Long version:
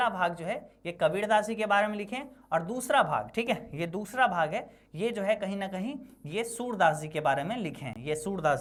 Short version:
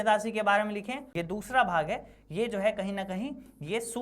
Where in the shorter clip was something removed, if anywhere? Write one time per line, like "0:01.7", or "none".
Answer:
0:01.1